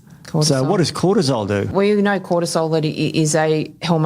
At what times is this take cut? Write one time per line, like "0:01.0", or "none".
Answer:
0:01.7